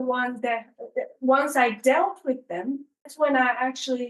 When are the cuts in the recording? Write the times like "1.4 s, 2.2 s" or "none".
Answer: 3.1 s